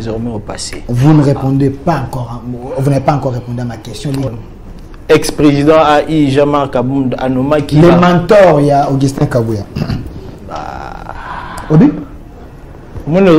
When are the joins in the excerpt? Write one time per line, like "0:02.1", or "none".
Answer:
0:04.3